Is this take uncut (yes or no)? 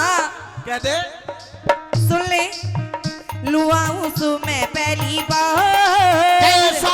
yes